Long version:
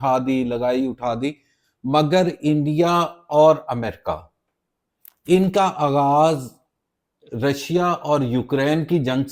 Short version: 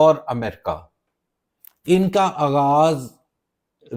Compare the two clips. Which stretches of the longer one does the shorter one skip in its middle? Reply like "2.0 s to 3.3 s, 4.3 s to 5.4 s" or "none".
none